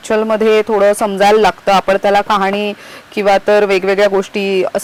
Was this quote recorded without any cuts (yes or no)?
yes